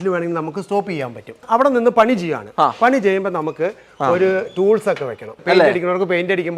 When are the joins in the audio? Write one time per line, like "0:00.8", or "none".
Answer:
0:01.4
0:05.3